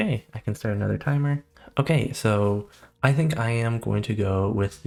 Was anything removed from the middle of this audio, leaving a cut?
no; 0 cuts

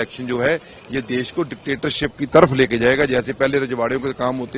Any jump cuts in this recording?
no; 0 cuts

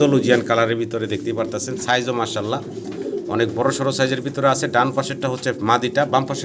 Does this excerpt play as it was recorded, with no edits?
yes; 0 cuts

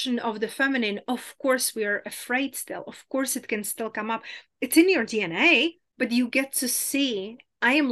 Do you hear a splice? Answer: yes; 1 cut; at 5.8 s

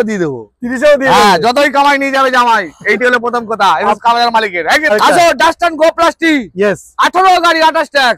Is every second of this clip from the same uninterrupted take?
no; 1 cut; at 4.9 s

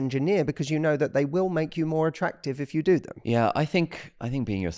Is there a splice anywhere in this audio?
yes; 1 cut; at 3.1 s

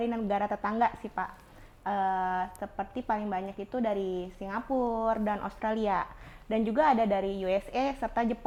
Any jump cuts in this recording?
no; 0 cuts

